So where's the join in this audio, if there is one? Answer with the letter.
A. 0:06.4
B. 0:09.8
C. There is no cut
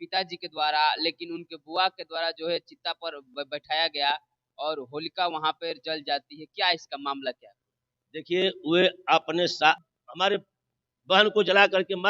B